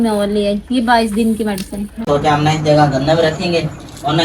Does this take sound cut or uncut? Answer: cut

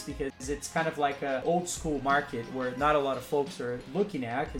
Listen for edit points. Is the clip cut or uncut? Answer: cut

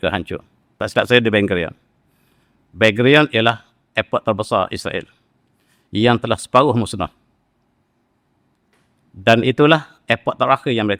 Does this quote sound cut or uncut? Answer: uncut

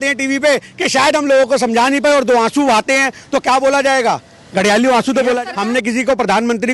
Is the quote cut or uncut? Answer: cut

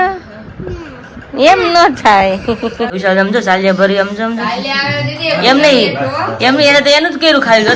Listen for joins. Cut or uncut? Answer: cut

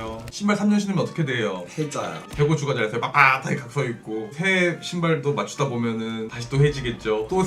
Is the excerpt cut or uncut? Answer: cut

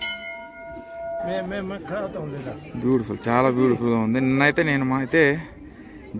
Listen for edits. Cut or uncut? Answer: cut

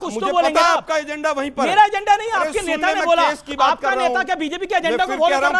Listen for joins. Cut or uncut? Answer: uncut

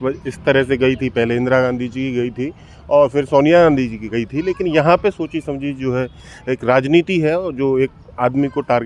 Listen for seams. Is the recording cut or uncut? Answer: uncut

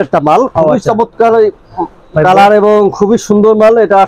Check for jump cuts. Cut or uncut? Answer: uncut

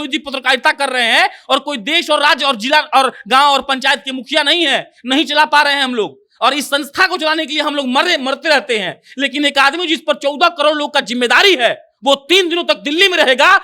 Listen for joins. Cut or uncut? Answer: uncut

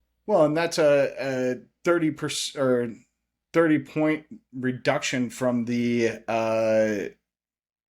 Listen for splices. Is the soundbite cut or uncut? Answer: uncut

